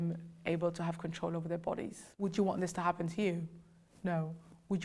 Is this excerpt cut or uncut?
cut